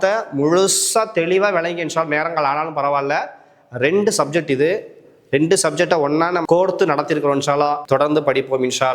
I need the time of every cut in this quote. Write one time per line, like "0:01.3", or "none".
0:06.4
0:07.8